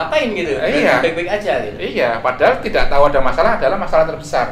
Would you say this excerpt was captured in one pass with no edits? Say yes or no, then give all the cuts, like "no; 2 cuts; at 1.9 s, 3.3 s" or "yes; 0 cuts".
yes; 0 cuts